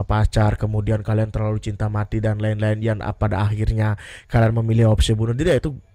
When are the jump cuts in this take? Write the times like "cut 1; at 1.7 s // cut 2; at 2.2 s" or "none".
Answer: none